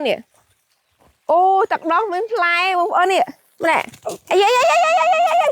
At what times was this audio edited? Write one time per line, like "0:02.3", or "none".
0:03.4